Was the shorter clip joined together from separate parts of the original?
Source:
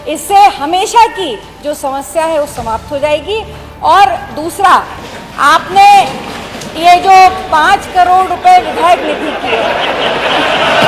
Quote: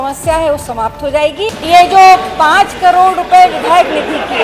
yes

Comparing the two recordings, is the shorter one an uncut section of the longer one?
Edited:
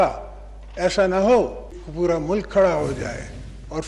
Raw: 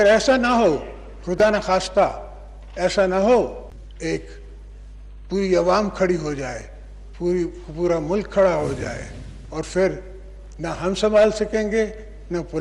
no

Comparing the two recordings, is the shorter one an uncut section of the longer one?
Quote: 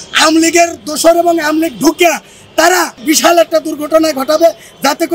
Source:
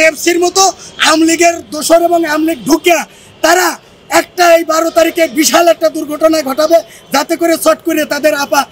no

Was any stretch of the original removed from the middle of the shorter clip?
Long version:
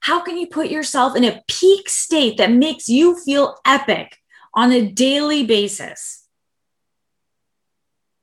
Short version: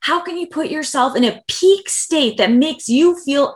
no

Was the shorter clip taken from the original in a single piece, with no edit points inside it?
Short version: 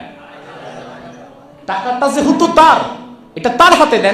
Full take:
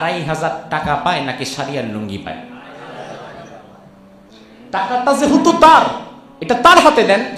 no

